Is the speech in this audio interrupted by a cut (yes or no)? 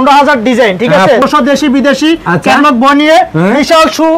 yes